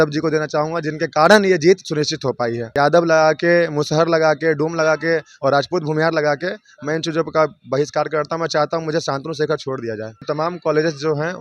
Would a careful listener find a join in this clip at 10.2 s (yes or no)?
yes